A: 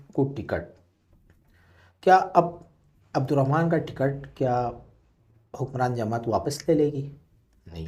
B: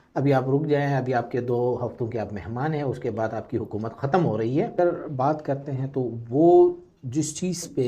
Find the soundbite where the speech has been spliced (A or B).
B